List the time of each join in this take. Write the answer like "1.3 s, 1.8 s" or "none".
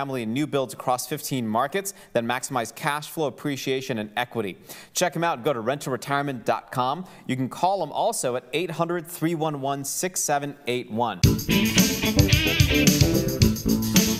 11.2 s